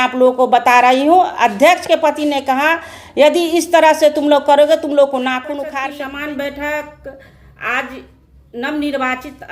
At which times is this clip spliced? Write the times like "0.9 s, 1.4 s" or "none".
5.7 s